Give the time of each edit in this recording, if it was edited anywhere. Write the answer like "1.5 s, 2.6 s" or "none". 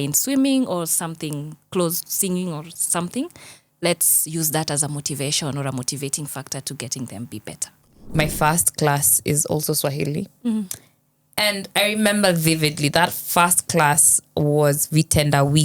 8.1 s